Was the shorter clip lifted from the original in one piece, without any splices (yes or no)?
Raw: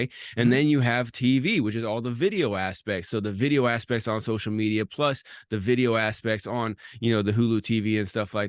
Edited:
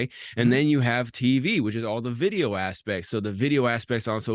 yes